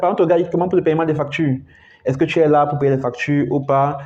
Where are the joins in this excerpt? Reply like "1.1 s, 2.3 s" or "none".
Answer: none

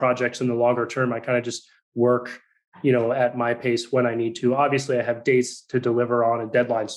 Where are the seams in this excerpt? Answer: none

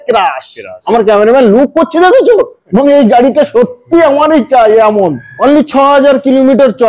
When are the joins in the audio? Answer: 5.3 s

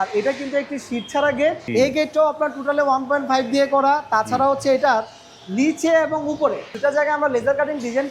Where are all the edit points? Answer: 1.6 s, 6.7 s

